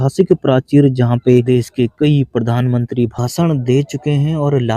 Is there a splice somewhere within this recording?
yes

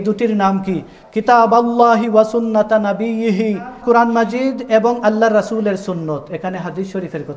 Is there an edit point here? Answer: yes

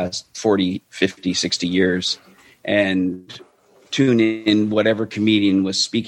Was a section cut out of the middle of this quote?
no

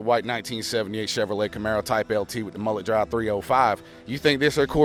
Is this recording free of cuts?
yes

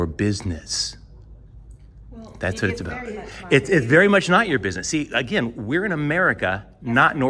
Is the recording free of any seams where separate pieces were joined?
yes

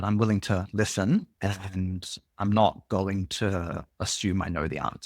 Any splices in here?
yes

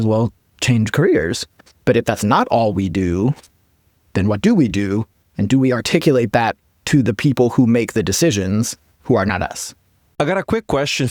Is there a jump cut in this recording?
no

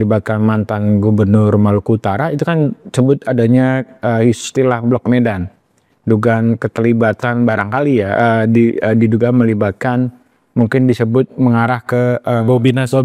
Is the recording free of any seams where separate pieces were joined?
yes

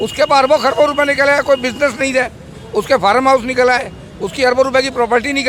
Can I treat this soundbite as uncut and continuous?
yes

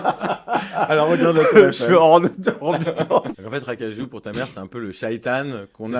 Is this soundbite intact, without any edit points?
no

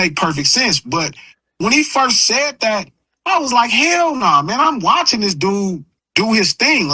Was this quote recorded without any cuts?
yes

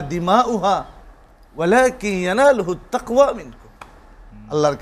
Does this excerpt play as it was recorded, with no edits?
yes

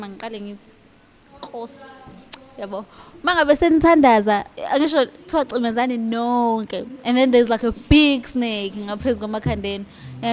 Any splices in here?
no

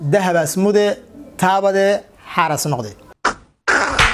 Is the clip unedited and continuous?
yes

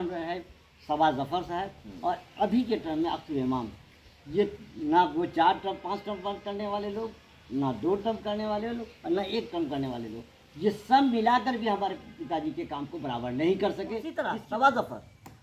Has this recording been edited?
yes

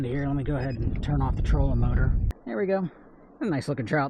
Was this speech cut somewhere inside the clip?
yes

